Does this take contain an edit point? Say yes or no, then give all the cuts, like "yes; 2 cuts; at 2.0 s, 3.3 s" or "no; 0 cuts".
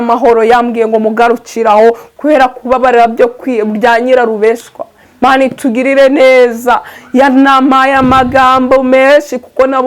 yes; 1 cut; at 2.1 s